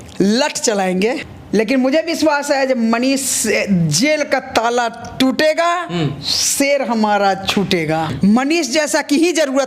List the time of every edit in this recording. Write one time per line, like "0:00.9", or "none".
0:01.3
0:08.1

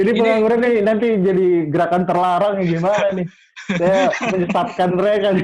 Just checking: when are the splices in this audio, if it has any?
none

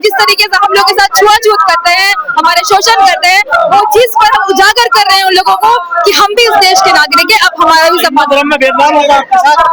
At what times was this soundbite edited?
none

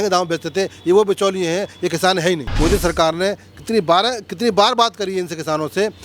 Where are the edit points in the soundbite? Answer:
0:02.6

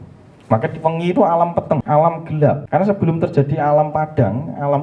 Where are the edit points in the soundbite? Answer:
0:01.8
0:02.6

